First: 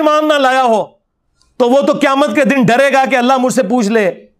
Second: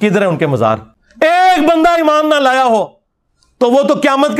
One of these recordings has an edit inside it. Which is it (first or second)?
second